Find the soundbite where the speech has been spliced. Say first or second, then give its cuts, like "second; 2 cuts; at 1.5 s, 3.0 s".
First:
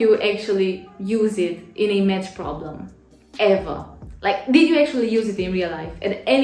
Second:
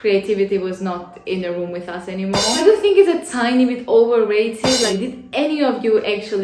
second; 2 cuts; at 2.6 s, 4.9 s